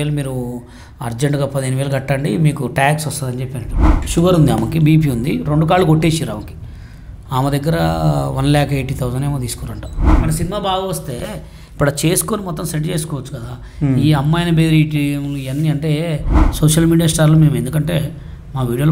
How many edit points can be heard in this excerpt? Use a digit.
3